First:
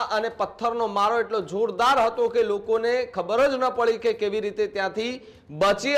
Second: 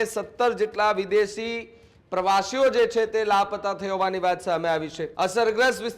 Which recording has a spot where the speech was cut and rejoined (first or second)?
second